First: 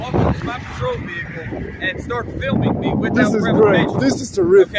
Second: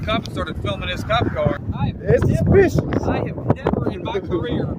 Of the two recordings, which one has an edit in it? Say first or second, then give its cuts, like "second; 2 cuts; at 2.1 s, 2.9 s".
second; 1 cut; at 1.6 s